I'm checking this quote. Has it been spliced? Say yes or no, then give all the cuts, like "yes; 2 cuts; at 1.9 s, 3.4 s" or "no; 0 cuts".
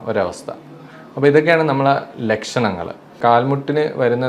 yes; 1 cut; at 3.2 s